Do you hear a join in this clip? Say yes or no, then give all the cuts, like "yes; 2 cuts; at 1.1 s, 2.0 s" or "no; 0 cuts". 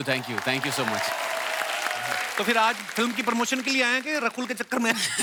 no; 0 cuts